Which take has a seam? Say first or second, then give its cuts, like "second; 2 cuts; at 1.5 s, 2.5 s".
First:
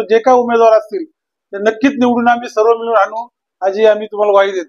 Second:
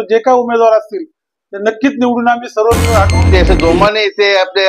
second; 1 cut; at 3.3 s